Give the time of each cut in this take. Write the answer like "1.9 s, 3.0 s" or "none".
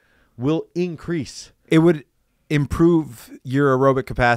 1.6 s

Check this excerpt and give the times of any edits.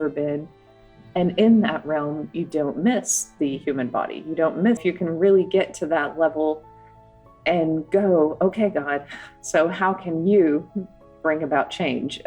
4.8 s

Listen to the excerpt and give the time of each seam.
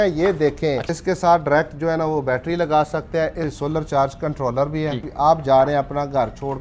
0.9 s, 3.6 s, 5.0 s

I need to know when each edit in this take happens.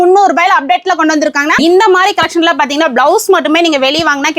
1.6 s

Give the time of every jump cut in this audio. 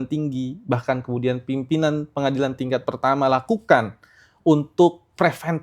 none

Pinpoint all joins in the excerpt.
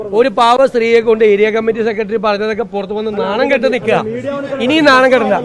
none

